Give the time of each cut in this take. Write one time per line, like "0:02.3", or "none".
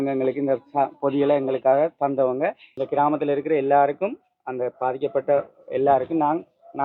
0:02.7